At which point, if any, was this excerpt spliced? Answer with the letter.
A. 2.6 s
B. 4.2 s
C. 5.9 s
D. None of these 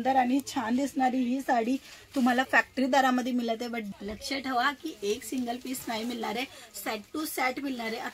D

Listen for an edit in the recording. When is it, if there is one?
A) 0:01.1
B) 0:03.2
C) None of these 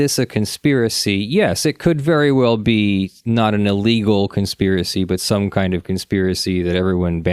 C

